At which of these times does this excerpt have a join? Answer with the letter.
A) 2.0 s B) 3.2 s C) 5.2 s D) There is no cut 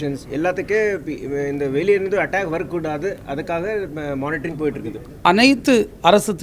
C